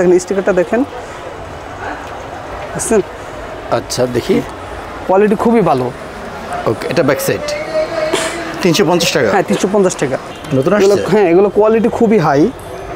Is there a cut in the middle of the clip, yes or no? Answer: yes